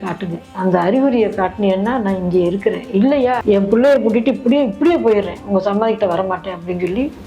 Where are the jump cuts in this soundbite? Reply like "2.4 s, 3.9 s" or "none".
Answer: 3.4 s